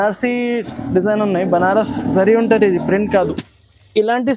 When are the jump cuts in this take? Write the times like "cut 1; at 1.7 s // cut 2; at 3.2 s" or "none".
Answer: cut 1; at 3.5 s